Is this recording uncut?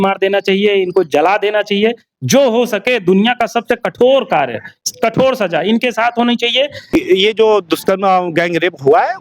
no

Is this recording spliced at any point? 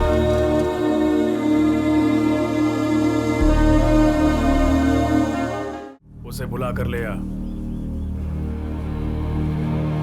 yes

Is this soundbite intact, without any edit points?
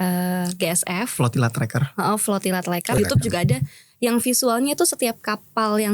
no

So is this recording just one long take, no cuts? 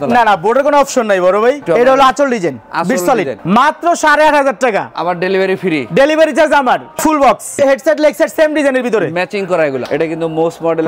no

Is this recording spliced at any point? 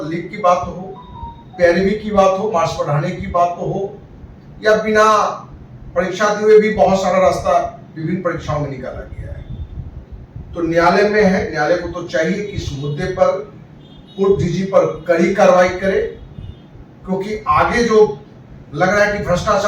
no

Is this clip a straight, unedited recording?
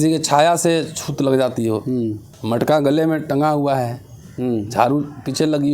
no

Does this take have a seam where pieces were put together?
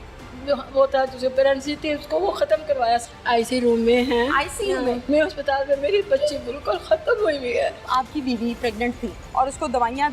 yes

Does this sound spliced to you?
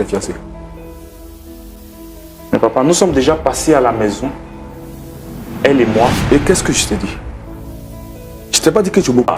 yes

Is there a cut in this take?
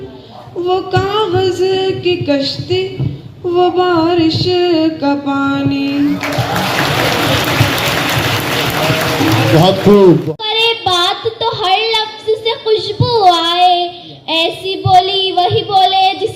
yes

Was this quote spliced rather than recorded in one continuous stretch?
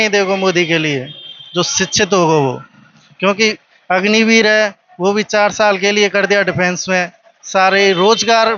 no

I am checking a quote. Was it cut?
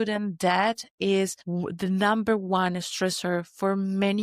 yes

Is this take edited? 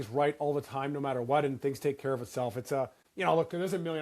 yes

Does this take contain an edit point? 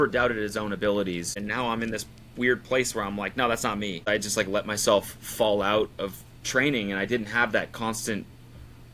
yes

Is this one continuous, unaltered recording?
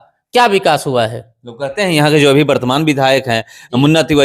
yes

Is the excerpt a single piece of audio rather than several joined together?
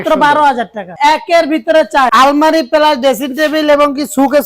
no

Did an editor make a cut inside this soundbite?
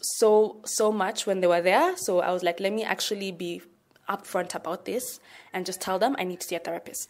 no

